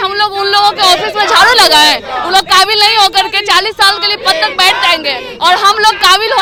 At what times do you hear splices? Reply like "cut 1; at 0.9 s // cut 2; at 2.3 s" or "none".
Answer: none